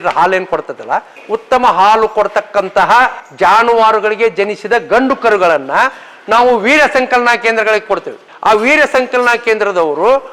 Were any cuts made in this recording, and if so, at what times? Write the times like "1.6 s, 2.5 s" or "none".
1.2 s, 3.2 s